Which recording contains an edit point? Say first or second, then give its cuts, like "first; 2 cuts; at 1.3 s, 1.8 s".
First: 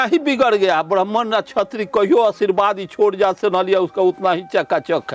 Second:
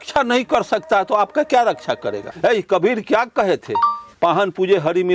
second; 2 cuts; at 2.3 s, 4.0 s